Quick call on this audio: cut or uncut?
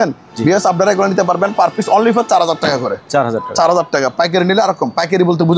uncut